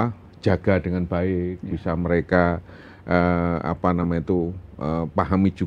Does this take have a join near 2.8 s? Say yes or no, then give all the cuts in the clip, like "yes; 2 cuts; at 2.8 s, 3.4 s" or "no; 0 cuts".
no; 0 cuts